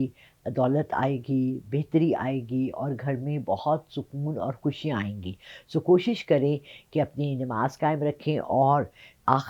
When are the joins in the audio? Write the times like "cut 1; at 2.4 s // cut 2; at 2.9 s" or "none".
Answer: none